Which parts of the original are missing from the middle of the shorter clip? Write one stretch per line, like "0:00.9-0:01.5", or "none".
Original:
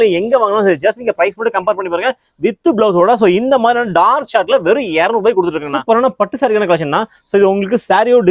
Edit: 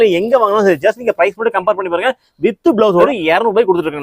0:03.1-0:04.7